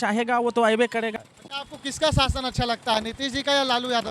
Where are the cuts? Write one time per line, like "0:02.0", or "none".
0:01.1